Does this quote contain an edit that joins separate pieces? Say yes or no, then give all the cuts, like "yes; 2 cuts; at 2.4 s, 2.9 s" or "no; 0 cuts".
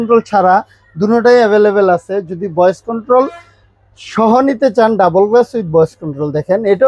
no; 0 cuts